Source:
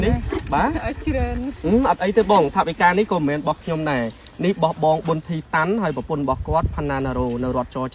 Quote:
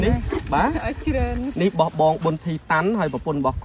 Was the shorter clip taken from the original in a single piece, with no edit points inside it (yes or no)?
no